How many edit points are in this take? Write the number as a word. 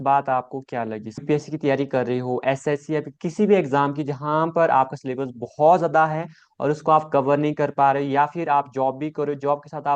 one